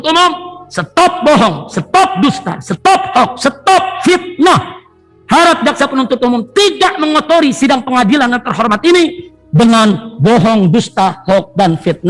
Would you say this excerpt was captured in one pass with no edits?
yes; 0 cuts

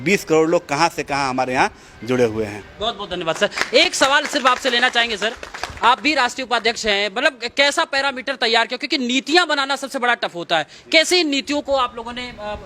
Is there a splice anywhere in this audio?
no; 0 cuts

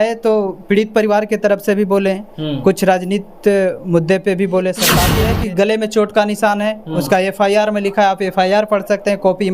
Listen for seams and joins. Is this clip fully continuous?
no; 1 cut; at 5.1 s

